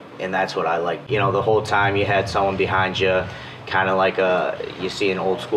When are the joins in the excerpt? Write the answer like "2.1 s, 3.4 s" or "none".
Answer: 1.0 s